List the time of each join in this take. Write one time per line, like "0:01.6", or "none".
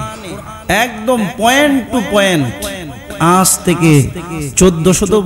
0:03.2